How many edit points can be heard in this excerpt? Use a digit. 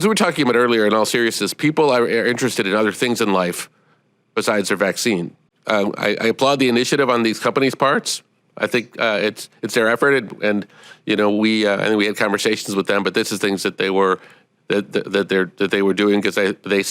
1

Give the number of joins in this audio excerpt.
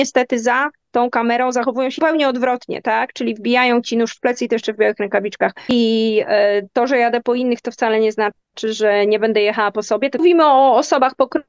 3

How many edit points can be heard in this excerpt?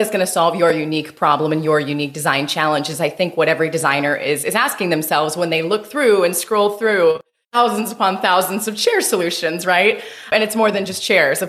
2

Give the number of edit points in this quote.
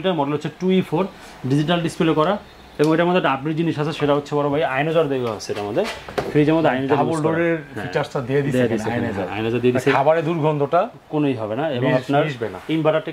0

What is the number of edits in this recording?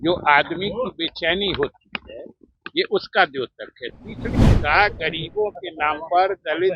1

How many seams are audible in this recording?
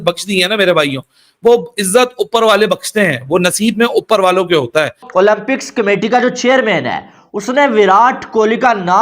1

